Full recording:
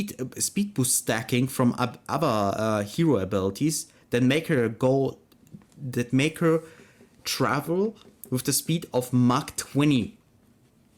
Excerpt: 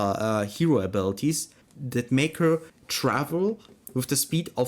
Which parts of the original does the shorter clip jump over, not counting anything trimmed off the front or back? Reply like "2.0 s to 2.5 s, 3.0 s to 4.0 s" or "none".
3.9 s to 5.5 s, 6.8 s to 7.2 s